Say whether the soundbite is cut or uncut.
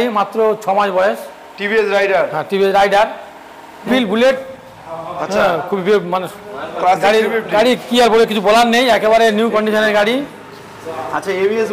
cut